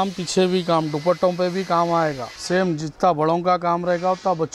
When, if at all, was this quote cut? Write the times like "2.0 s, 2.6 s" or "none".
2.3 s